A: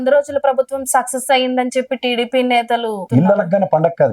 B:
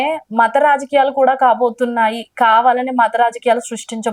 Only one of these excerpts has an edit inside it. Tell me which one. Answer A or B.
A